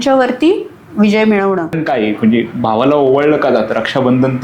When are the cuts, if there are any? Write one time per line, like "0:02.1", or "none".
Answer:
0:01.8